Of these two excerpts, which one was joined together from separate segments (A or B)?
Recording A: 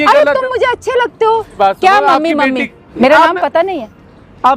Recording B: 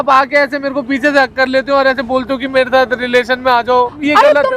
A